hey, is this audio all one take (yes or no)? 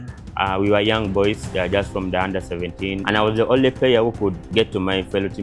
no